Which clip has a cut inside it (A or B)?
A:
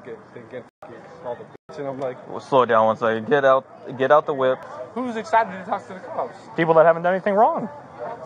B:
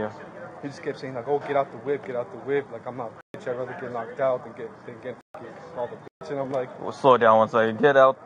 A